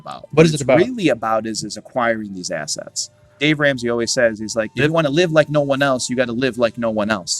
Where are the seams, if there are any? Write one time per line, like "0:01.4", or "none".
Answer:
0:03.4
0:04.7